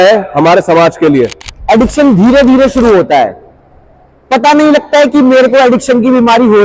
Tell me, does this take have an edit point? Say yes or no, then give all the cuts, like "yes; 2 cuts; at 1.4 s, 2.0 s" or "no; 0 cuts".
yes; 1 cut; at 1.5 s